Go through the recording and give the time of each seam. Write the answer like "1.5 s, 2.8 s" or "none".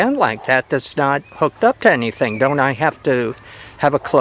none